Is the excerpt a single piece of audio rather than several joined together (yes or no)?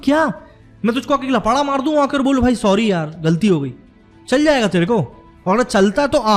yes